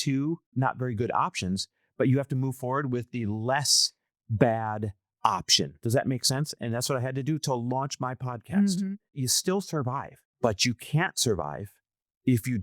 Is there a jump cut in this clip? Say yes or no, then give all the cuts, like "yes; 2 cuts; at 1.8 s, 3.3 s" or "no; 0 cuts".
yes; 2 cuts; at 9.2 s, 10.2 s